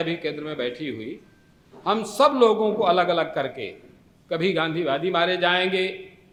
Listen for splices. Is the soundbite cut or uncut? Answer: uncut